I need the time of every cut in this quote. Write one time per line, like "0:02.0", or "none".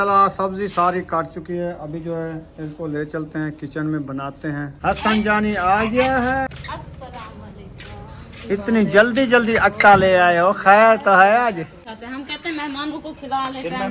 0:04.7
0:06.5
0:11.9